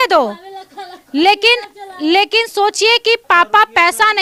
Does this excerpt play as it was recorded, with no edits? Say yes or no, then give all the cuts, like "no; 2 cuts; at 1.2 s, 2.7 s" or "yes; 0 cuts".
yes; 0 cuts